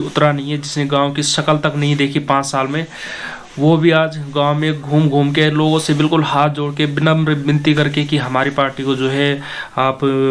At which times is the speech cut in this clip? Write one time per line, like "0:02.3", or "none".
none